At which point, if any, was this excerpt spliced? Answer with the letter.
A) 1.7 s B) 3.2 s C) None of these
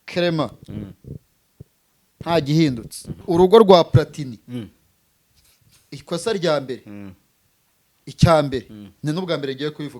B